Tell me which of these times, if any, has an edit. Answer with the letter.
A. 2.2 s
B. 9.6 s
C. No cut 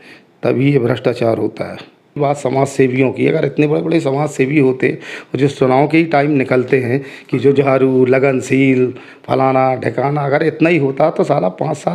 A